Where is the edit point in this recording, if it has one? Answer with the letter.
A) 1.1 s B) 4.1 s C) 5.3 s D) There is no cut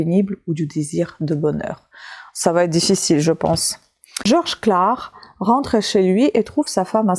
B